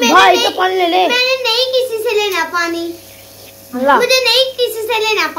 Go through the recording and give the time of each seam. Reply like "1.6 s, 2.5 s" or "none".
3.8 s